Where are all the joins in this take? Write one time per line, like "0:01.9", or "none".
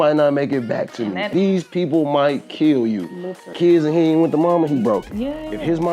0:01.3
0:03.5